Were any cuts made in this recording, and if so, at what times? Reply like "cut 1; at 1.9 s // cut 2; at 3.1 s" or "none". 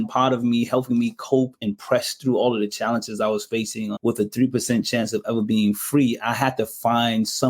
cut 1; at 1.6 s // cut 2; at 3.9 s